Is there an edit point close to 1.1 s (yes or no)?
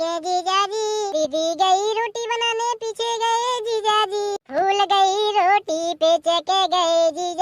yes